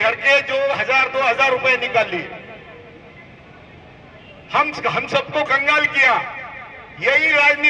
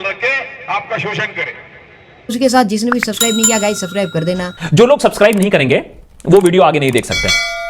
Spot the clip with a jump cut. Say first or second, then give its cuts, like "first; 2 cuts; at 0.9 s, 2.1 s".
second; 1 cut; at 2.1 s